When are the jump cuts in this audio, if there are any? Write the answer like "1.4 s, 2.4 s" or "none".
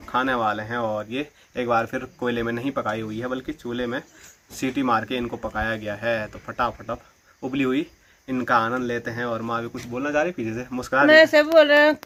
none